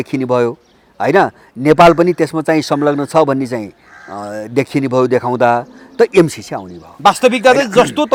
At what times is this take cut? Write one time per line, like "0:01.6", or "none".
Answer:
none